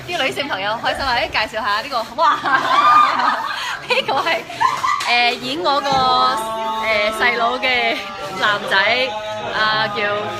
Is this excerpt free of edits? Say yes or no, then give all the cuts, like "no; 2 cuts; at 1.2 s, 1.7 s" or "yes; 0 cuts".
yes; 0 cuts